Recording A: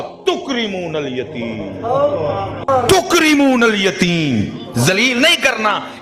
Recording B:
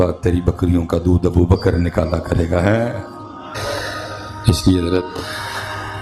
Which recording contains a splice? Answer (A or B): B